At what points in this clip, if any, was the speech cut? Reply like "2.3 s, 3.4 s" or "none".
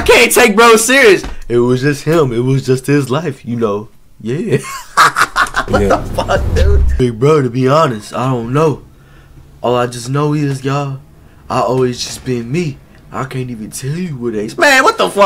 6.8 s